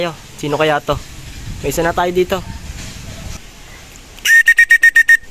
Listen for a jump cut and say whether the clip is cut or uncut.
cut